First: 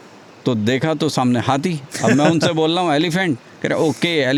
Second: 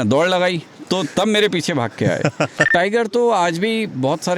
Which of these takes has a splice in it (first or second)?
second